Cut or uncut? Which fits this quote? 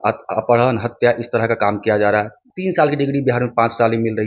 cut